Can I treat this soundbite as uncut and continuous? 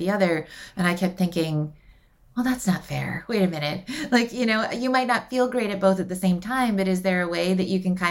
yes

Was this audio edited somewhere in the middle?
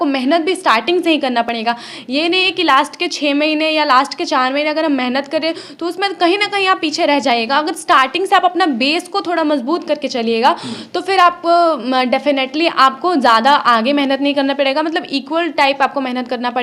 no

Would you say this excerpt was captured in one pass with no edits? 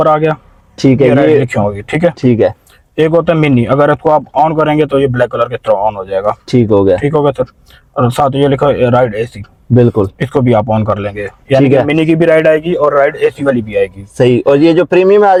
yes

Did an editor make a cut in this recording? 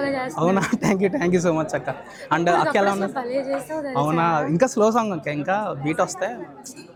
no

